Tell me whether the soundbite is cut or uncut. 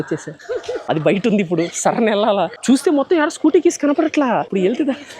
uncut